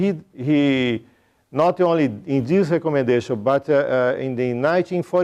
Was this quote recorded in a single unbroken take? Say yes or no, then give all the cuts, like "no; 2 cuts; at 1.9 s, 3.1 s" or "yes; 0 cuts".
yes; 0 cuts